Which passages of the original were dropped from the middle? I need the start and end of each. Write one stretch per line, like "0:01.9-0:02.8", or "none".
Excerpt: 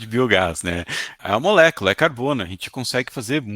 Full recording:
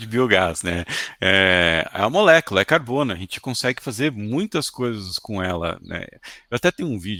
0:01.2-0:01.9